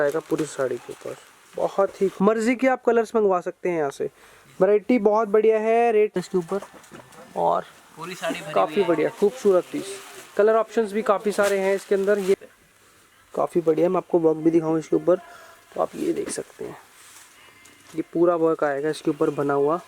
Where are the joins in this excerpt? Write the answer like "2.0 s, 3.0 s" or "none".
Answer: 2.1 s, 6.2 s, 12.4 s